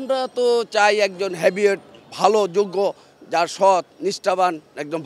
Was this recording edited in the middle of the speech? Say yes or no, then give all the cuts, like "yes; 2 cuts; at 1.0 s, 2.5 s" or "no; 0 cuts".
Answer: no; 0 cuts